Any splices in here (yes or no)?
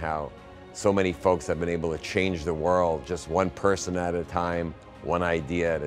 no